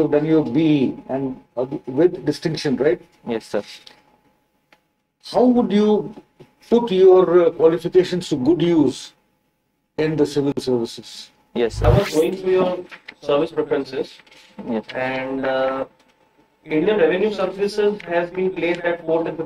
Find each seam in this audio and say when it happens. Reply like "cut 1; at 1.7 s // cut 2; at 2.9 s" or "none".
cut 1; at 11.8 s